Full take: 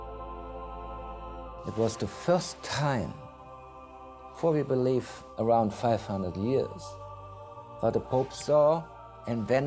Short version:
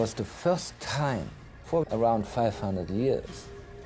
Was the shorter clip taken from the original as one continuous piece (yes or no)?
no